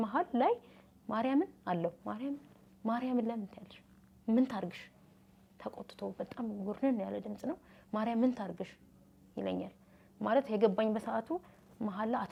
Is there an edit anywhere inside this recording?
no; 0 cuts

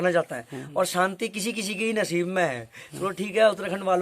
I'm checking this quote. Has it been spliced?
no; 0 cuts

